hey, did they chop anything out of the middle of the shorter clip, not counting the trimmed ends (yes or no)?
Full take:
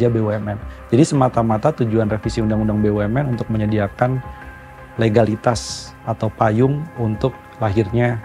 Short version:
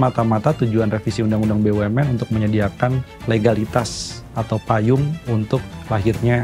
yes